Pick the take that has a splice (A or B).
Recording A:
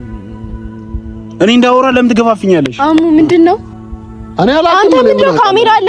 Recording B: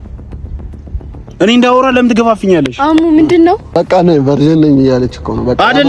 B